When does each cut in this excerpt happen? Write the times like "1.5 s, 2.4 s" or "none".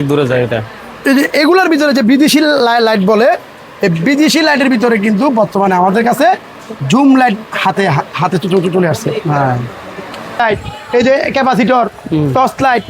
10.4 s